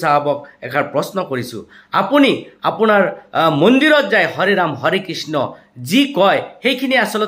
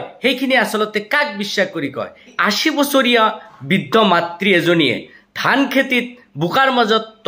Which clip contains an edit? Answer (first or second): second